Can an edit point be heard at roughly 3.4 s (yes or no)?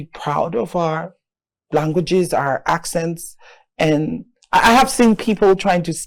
no